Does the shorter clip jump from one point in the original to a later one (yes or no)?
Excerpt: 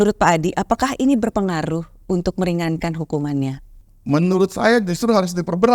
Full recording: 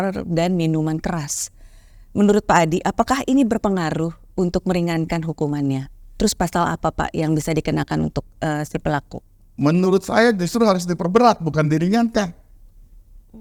yes